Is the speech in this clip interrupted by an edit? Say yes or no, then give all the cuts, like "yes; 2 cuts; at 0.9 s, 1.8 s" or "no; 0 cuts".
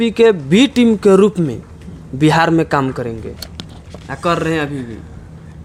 no; 0 cuts